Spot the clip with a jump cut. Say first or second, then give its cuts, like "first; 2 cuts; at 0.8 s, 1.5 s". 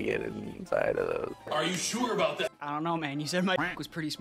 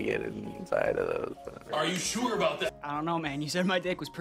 first; 1 cut; at 1.4 s